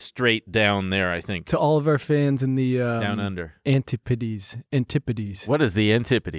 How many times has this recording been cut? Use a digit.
1